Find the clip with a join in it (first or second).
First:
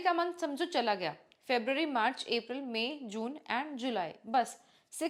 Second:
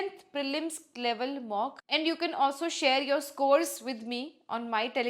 second